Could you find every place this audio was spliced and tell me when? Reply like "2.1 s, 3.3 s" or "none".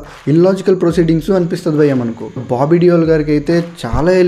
2.2 s